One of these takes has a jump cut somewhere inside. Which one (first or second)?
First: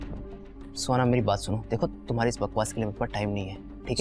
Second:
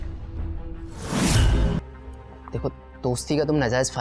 second